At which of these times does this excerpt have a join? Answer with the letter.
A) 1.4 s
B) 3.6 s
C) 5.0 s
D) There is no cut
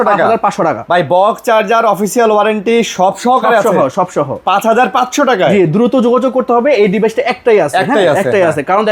D